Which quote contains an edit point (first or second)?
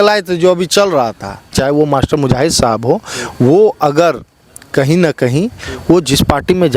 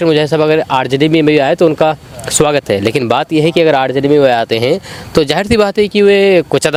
first